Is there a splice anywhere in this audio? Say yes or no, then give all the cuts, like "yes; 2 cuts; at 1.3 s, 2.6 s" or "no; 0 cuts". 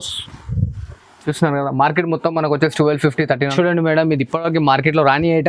yes; 1 cut; at 3.5 s